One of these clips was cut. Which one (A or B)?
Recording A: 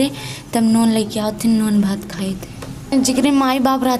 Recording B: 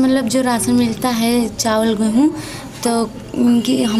A